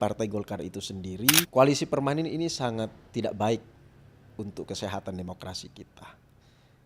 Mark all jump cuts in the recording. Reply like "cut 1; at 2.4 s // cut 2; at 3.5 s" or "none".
cut 1; at 1.5 s

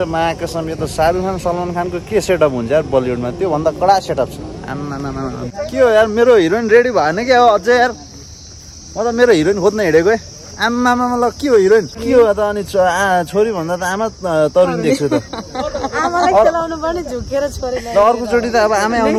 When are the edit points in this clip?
cut 1; at 5.5 s // cut 2; at 12.0 s

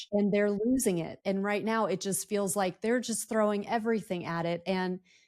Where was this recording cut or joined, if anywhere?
cut 1; at 1.2 s

